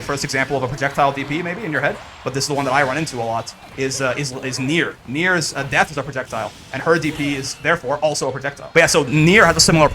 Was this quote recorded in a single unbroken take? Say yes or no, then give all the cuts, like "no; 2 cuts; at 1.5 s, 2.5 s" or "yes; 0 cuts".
no; 1 cut; at 8.6 s